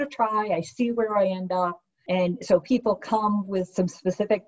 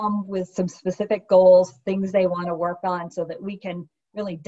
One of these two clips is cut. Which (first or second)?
first